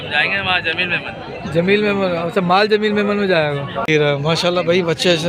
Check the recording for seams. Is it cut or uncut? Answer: cut